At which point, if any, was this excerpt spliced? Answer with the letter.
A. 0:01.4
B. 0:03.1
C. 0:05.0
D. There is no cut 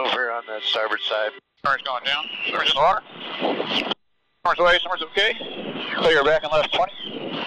A